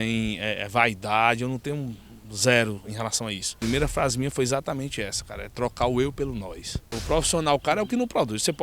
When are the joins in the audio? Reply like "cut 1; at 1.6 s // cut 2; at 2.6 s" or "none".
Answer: cut 1; at 3.5 s // cut 2; at 6.9 s